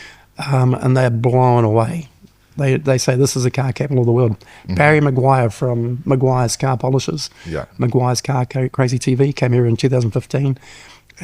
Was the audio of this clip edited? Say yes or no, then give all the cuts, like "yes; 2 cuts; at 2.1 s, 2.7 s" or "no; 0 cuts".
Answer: no; 0 cuts